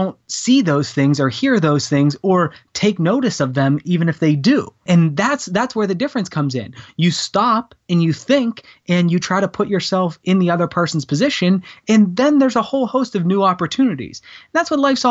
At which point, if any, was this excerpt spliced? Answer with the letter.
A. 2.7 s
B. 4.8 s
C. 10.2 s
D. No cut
B